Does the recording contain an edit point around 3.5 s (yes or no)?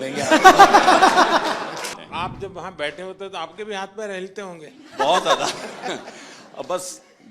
no